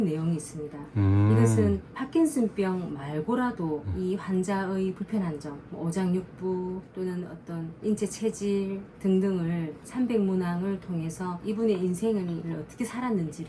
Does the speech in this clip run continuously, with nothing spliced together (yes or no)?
yes